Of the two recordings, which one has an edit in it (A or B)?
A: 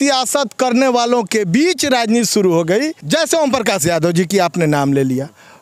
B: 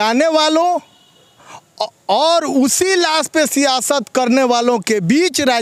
A